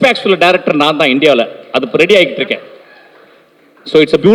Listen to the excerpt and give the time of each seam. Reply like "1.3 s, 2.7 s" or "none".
none